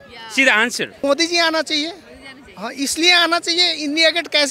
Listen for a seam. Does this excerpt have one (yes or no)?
yes